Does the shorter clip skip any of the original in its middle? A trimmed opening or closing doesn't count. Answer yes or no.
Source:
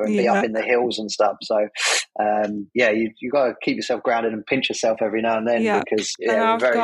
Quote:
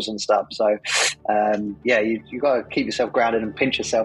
no